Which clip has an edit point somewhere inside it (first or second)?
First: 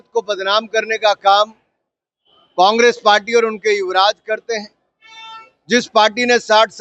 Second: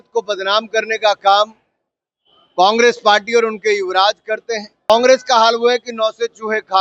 second